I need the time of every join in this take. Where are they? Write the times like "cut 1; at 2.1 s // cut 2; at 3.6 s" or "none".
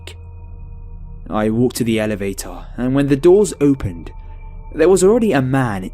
cut 1; at 1.7 s